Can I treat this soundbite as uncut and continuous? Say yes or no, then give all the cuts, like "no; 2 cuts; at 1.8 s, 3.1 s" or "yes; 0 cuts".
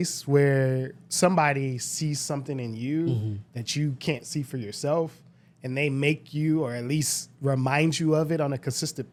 yes; 0 cuts